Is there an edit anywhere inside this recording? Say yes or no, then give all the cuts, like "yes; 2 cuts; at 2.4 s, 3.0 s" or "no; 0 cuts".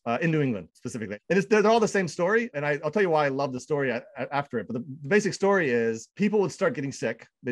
no; 0 cuts